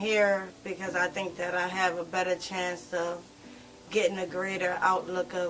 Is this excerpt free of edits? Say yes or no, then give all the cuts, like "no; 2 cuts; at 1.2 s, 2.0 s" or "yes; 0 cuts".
no; 1 cut; at 1.3 s